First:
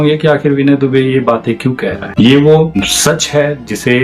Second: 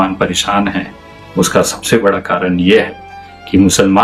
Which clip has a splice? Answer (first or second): first